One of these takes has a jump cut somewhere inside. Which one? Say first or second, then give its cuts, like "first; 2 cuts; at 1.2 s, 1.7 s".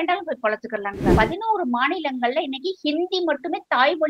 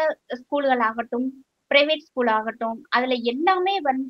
first; 1 cut; at 1.1 s